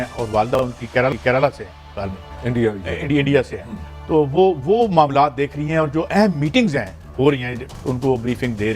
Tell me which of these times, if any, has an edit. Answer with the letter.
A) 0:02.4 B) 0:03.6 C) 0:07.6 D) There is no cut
C